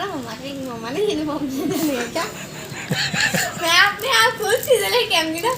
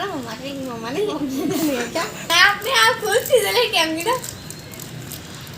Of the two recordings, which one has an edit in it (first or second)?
second